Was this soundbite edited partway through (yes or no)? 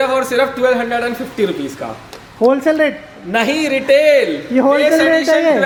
no